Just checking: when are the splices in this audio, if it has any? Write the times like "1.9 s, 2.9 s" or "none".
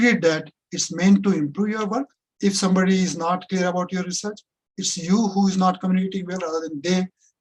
none